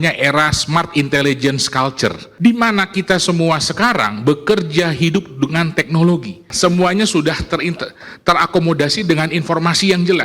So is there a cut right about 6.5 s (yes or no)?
yes